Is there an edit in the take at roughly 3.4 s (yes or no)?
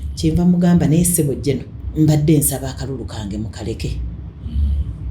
no